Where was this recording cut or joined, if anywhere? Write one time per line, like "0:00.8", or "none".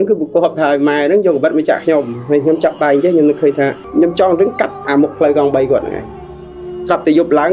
0:03.8

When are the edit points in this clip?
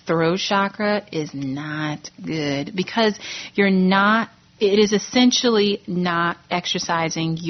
0:04.4

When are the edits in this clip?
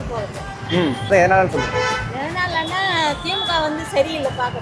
0:01.1

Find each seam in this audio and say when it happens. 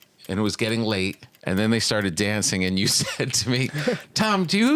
0:01.4

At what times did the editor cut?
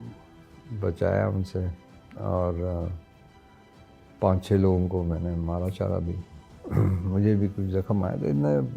none

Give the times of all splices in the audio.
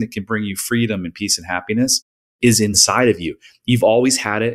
0:02.8

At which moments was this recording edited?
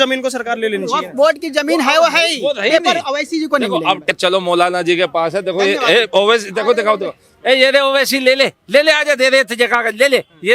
0:04.1

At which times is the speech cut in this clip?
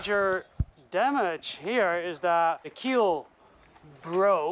0:02.7

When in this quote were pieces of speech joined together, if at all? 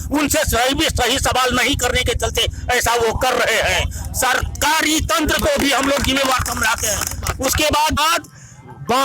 0:08.0

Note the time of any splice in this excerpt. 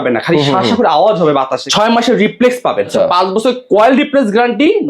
0:01.6
0:02.9

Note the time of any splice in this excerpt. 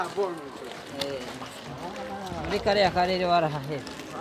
none

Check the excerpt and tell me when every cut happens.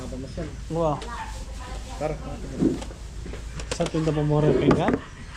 none

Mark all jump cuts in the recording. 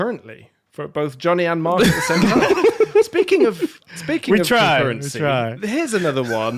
none

